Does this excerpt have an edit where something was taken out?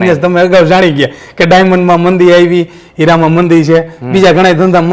no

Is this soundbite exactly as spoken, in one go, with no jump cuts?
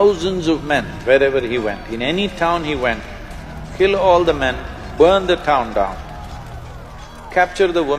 yes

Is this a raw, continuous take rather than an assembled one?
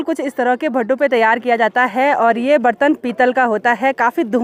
yes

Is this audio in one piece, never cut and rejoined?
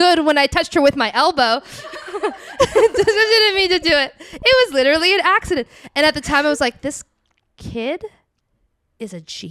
yes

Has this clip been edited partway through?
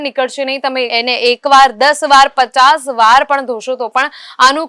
no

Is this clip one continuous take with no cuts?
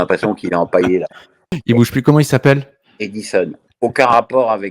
no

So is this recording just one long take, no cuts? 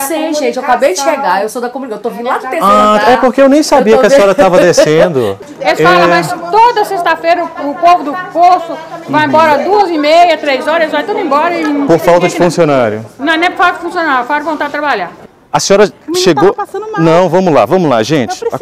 no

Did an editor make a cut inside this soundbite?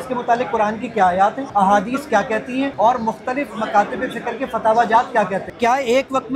yes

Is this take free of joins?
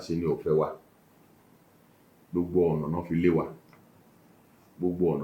yes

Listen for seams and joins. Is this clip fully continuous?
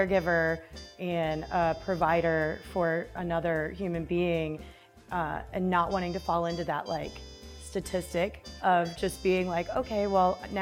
yes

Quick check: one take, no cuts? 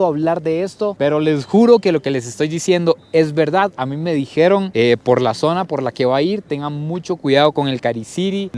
yes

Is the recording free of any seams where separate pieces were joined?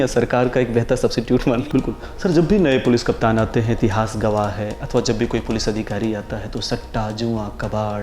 no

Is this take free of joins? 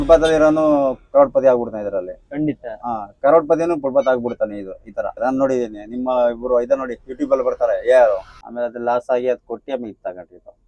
no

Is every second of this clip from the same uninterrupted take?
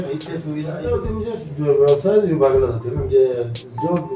no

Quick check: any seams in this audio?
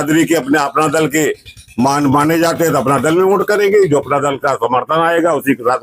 no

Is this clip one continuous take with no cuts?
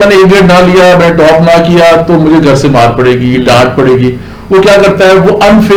yes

